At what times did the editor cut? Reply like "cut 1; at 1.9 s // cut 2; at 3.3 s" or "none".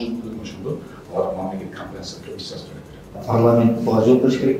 cut 1; at 3.2 s

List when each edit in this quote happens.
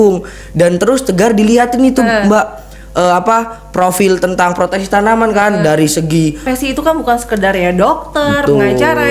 cut 1; at 6.4 s

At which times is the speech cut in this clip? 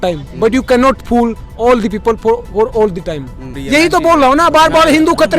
cut 1; at 3.5 s

